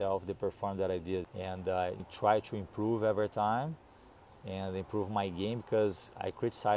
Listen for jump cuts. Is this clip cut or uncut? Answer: cut